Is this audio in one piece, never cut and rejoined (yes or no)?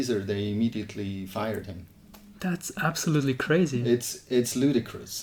yes